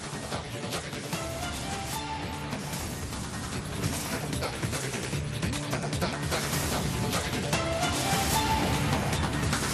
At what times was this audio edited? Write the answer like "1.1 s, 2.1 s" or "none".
none